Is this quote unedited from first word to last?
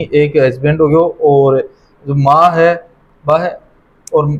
yes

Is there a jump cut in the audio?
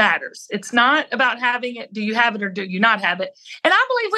no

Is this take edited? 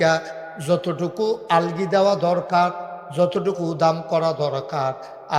no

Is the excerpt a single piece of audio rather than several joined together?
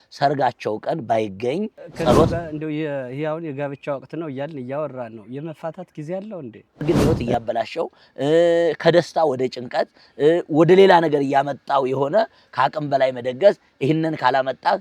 no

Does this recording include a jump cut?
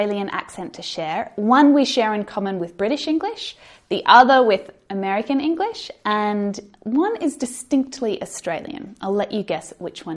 no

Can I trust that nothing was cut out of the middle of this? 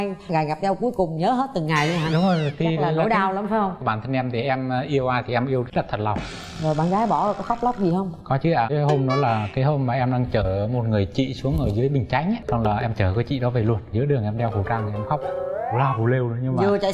no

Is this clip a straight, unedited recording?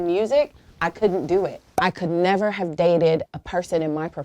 no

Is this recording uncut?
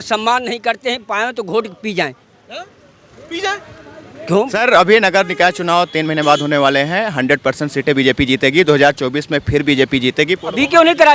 no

